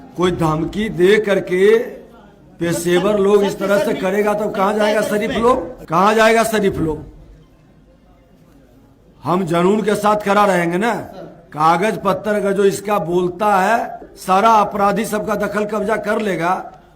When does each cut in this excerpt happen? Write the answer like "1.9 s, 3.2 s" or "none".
5.8 s, 14.1 s